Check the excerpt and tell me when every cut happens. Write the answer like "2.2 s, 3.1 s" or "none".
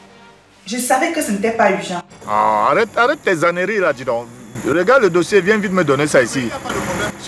none